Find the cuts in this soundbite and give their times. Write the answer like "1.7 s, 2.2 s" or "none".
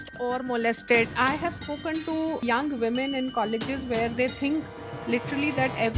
1.1 s